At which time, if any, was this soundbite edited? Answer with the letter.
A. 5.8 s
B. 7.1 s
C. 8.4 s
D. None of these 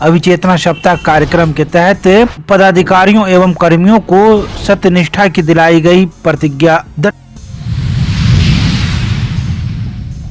B